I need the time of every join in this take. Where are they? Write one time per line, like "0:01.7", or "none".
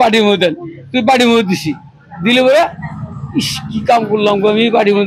none